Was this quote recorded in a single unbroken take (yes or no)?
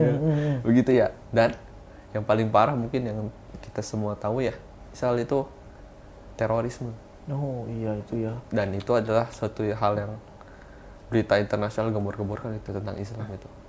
yes